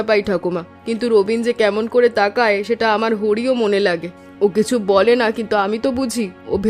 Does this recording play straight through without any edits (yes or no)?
yes